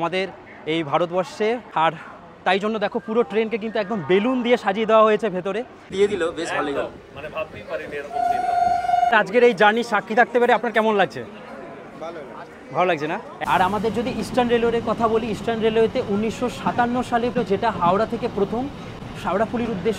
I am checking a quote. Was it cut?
yes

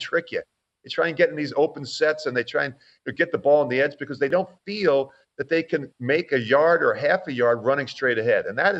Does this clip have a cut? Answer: yes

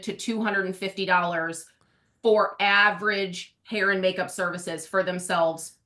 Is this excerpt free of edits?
yes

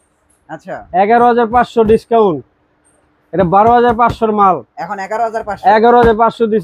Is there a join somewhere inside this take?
no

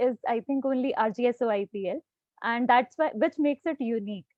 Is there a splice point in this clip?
no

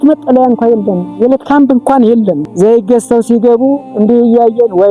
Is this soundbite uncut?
no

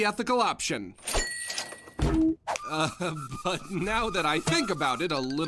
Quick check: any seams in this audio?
yes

